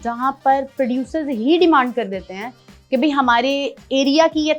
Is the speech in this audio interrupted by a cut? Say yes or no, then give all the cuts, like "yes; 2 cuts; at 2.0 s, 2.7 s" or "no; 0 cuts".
no; 0 cuts